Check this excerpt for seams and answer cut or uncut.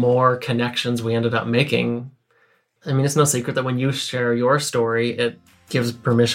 cut